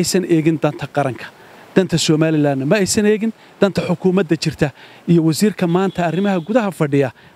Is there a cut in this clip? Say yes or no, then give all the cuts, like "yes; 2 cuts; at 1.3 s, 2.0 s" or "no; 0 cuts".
no; 0 cuts